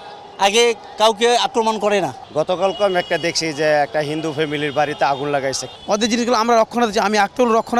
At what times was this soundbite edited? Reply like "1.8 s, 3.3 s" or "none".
2.2 s, 5.6 s